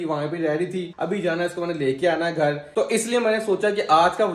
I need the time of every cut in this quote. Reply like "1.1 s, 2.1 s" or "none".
none